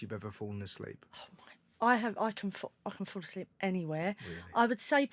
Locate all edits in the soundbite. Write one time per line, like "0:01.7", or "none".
none